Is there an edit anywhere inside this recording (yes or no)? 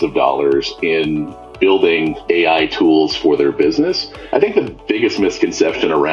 yes